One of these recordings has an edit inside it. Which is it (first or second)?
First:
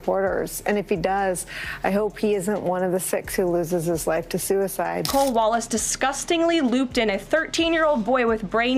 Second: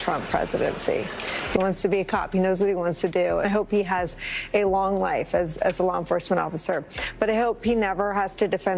first